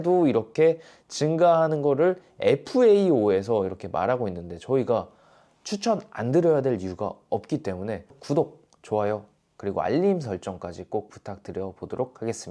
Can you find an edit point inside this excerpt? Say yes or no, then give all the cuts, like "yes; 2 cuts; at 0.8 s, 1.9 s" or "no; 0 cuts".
yes; 1 cut; at 8.2 s